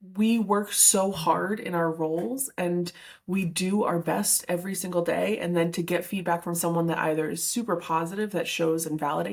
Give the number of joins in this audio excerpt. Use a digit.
0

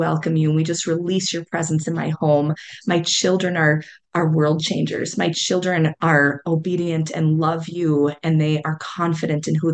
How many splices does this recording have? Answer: 0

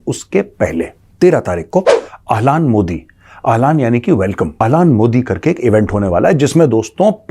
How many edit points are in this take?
2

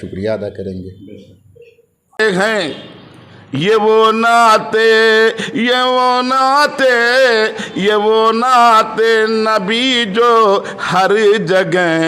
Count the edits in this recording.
1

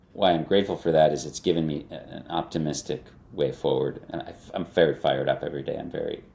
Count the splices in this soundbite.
1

